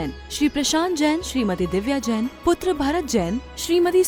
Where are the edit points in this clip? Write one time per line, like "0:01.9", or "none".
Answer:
none